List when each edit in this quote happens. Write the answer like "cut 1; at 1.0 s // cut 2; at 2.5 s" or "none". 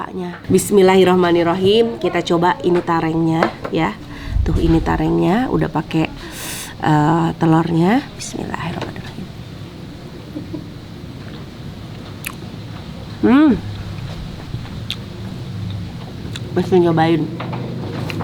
none

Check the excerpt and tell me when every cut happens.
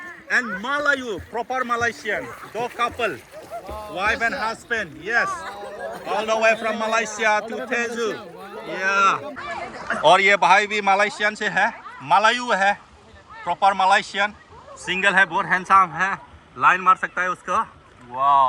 cut 1; at 9.4 s

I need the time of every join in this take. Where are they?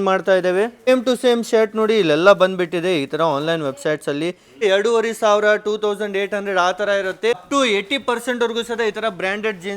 cut 1; at 4.6 s // cut 2; at 7.4 s

